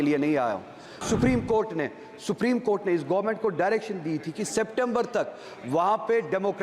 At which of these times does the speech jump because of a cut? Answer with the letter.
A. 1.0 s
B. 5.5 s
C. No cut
A